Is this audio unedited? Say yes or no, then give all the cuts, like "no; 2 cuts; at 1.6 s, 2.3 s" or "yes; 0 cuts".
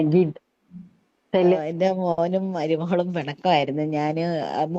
no; 1 cut; at 1.6 s